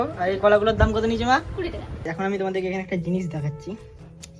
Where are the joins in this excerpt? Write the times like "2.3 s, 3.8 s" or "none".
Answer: 2.0 s